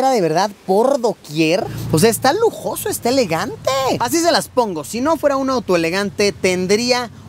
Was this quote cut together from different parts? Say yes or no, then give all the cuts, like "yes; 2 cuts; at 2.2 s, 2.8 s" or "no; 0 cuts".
yes; 1 cut; at 1.7 s